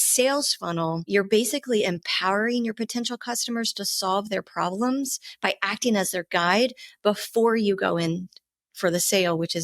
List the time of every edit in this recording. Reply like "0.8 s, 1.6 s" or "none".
1.1 s